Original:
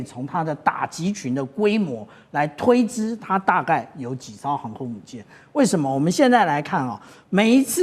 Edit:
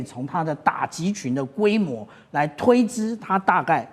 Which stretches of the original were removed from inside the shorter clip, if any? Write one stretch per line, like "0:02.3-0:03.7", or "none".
none